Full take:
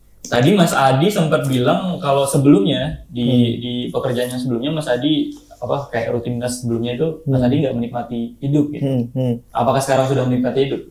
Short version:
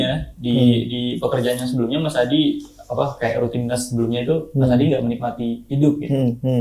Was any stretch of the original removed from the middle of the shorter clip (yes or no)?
no